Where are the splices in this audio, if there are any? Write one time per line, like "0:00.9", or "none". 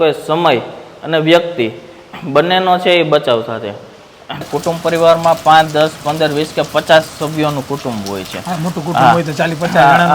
0:04.5

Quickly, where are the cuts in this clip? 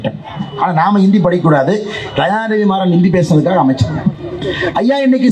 none

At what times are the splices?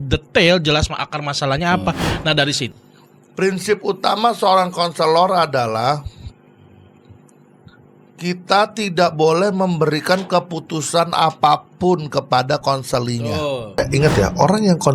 0:02.7
0:13.8

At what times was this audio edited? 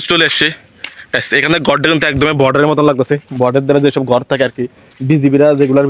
none

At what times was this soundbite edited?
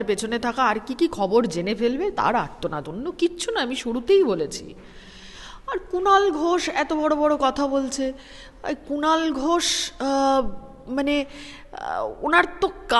none

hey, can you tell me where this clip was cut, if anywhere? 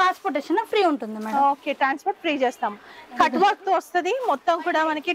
none

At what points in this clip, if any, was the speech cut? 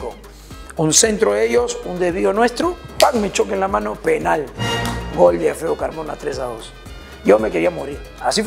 none

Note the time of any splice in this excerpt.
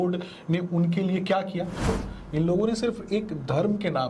0:02.0

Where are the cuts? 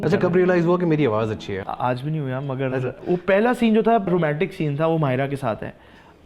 0:01.6
0:02.9
0:04.1

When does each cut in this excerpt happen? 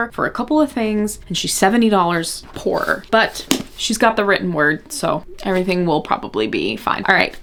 none

